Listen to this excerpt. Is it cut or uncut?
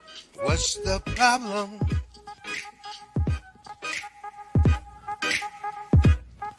uncut